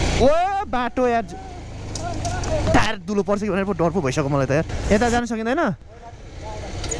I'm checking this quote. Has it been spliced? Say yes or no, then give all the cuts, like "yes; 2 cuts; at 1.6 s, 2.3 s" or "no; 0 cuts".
yes; 1 cut; at 4.8 s